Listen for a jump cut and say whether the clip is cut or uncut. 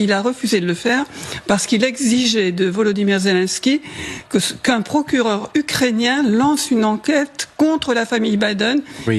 uncut